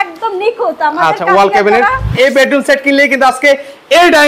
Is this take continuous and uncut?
no; 1 cut; at 2.1 s

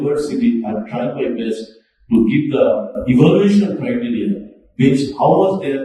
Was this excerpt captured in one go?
yes; 0 cuts

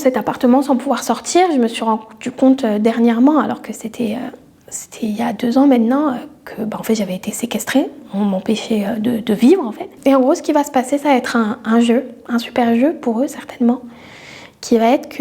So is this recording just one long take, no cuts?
yes; 0 cuts

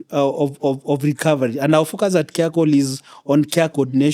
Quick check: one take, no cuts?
yes; 0 cuts

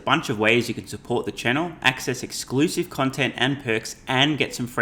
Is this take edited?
no; 0 cuts

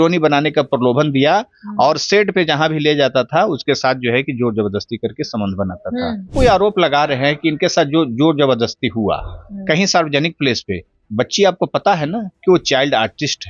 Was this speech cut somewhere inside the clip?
yes; 1 cut; at 6.3 s

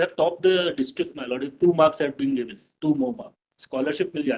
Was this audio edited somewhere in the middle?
yes; 1 cut; at 3.3 s

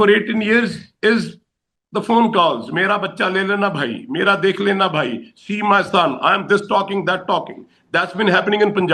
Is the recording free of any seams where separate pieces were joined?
yes; 0 cuts

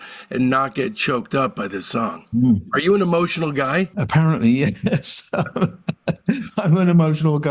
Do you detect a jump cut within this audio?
yes; 1 cut; at 3.9 s

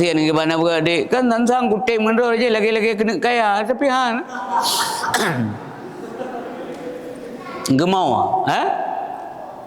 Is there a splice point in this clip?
no; 0 cuts

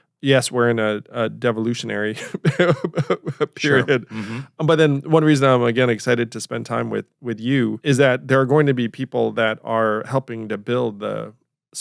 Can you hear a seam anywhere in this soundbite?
yes; 1 cut; at 7.8 s

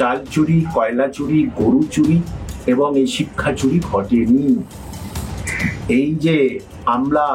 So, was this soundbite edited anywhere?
no; 0 cuts

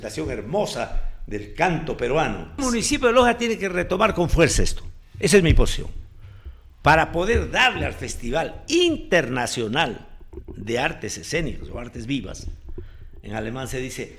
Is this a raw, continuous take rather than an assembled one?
no; 1 cut; at 2.6 s

